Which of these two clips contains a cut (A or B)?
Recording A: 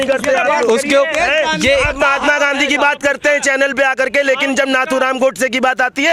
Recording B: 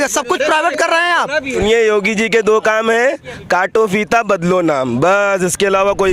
B